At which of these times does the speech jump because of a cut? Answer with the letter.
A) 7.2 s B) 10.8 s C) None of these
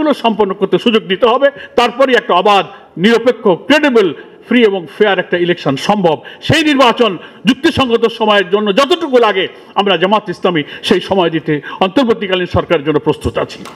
C